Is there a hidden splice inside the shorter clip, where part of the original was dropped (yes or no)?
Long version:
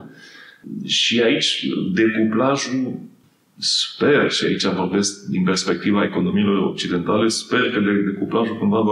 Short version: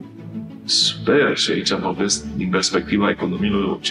no